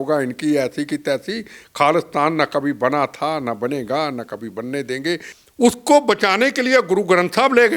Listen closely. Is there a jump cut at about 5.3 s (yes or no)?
yes